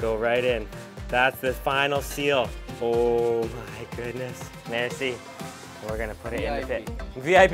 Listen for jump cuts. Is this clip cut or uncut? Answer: cut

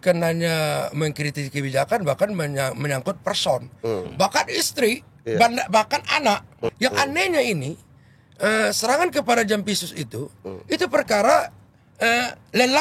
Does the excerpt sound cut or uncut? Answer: cut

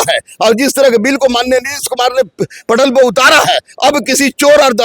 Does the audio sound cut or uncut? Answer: uncut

